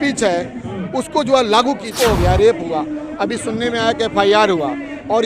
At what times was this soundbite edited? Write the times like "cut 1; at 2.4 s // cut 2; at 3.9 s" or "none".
cut 1; at 1.9 s